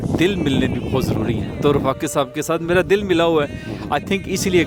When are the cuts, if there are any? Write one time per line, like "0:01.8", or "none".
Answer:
none